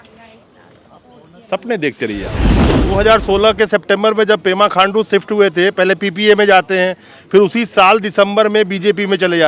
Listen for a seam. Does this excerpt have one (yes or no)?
yes